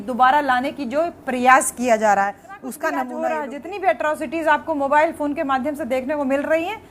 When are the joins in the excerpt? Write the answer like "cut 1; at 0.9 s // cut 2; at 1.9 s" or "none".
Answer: cut 1; at 3.1 s